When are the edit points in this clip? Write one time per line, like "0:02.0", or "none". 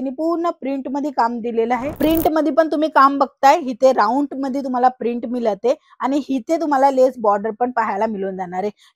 0:01.9